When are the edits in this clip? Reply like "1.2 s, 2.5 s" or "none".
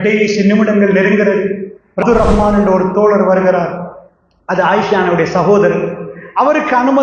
2.0 s